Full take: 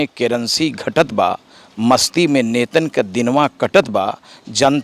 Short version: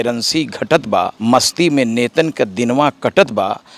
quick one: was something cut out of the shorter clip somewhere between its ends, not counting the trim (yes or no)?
yes